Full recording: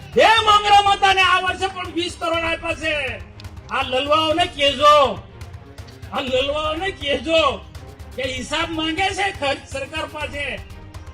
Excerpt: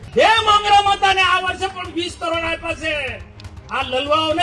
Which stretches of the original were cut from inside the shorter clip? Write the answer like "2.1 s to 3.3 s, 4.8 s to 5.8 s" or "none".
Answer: none